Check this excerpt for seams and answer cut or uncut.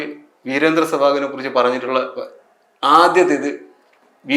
uncut